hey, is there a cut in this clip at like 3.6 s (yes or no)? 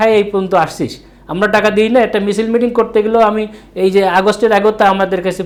no